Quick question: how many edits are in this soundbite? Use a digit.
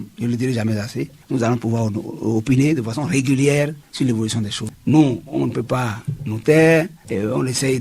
1